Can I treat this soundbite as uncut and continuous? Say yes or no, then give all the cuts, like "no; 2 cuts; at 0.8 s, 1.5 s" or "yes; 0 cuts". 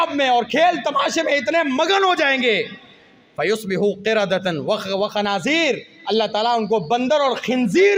yes; 0 cuts